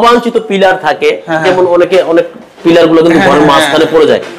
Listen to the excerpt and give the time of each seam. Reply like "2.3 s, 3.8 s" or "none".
none